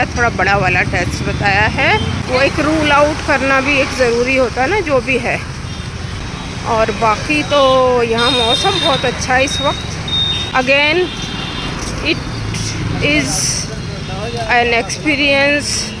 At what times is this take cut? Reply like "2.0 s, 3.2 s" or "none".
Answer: 2.2 s, 10.4 s